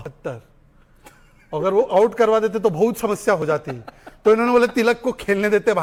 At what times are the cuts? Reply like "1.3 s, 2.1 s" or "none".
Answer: none